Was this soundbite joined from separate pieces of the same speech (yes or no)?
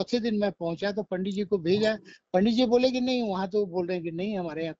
no